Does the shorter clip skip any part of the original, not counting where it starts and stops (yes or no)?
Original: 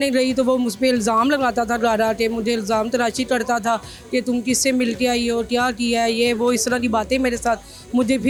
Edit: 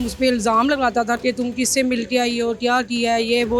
yes